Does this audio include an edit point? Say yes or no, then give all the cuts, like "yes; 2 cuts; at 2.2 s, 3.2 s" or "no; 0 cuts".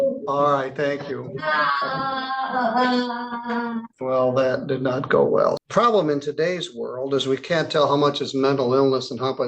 yes; 2 cuts; at 3.9 s, 5.6 s